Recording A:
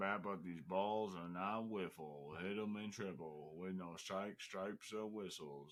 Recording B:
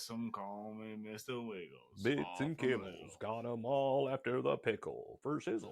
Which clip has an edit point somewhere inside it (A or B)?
B